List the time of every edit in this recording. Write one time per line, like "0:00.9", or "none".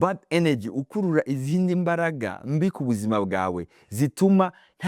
none